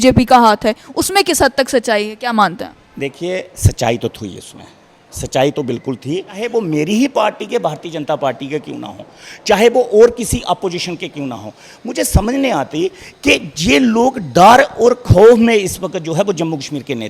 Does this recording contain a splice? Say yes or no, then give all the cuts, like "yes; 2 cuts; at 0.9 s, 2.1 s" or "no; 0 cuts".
yes; 1 cut; at 6.4 s